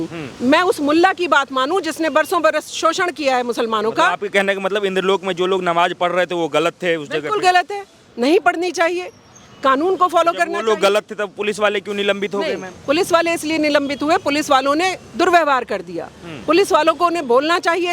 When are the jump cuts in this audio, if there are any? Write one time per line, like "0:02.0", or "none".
none